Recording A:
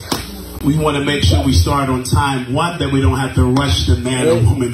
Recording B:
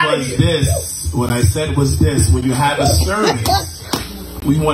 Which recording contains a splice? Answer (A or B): B